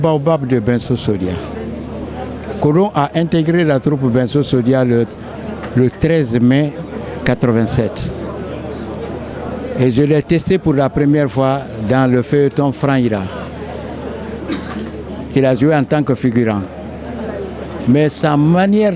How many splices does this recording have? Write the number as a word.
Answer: zero